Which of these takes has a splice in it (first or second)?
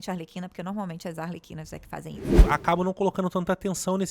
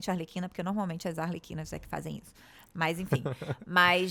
first